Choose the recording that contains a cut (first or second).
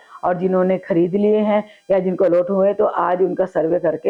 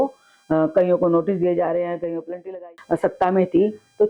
second